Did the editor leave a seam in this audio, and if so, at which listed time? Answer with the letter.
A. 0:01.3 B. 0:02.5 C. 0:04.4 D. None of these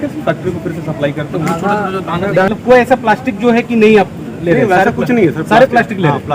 B